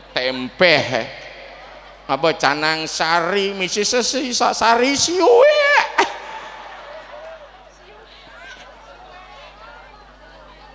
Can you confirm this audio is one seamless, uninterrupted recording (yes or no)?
yes